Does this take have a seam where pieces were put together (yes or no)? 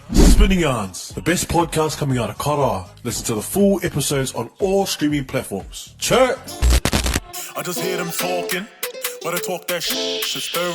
yes